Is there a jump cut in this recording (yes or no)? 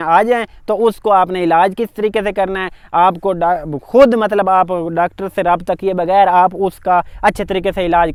no